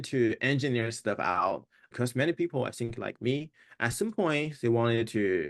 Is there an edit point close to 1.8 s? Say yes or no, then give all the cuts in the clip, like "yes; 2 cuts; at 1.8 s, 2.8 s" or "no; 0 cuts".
yes; 1 cut; at 1.8 s